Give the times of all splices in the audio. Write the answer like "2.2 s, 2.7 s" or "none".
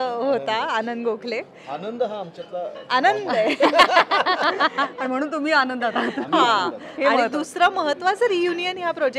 none